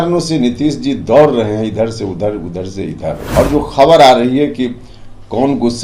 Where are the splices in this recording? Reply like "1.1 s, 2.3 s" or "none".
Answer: 3.2 s